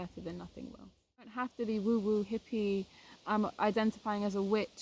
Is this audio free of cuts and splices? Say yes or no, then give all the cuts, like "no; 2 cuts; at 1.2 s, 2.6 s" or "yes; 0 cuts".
no; 1 cut; at 1.4 s